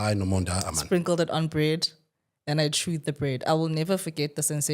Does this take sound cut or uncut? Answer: uncut